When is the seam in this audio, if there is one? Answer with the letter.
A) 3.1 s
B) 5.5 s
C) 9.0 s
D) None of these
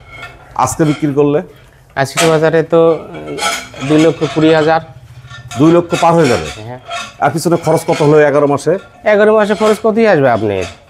D